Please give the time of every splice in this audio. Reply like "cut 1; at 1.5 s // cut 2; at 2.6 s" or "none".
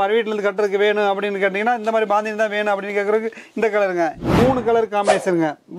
cut 1; at 4.2 s